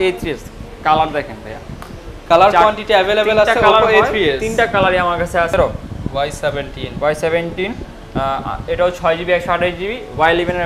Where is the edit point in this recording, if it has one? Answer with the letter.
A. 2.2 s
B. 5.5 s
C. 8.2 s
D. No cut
B